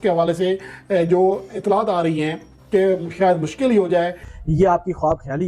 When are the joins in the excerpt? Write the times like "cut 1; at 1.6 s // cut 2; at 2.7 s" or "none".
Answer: cut 1; at 4.2 s

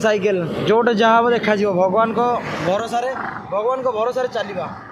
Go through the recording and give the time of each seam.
none

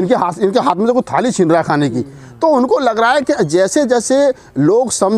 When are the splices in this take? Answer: none

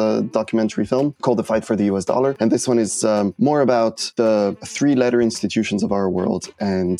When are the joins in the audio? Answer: cut 1; at 1.2 s // cut 2; at 2.4 s // cut 3; at 3.3 s // cut 4; at 4.4 s

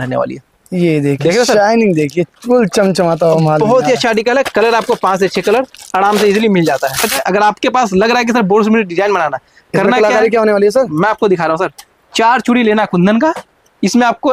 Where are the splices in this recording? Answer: cut 1; at 7.2 s

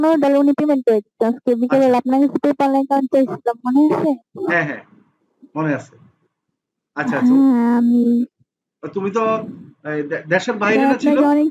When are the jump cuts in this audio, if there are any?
none

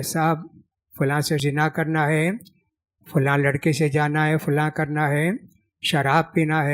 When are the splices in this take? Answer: cut 1; at 1.4 s

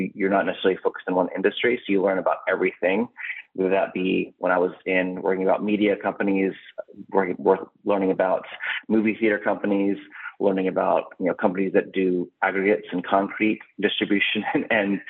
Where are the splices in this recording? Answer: none

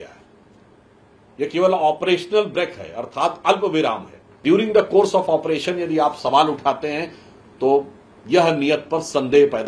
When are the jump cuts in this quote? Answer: cut 1; at 4.4 s

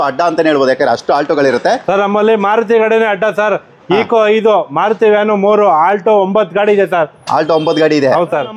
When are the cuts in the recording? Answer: none

